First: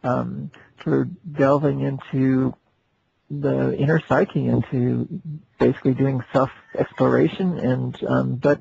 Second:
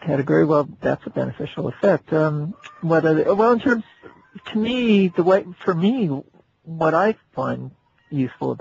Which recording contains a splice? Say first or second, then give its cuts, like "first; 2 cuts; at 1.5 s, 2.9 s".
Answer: second; 1 cut; at 5.4 s